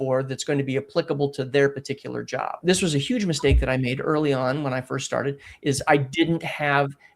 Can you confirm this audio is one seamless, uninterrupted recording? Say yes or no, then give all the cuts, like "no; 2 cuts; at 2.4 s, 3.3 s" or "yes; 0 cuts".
no; 1 cut; at 2.6 s